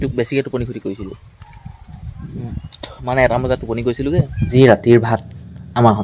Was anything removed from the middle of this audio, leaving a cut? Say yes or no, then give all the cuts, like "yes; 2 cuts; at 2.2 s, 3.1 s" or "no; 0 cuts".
yes; 1 cut; at 4.5 s